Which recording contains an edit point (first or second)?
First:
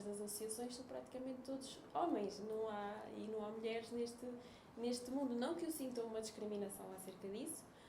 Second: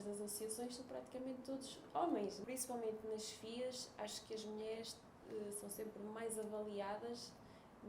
second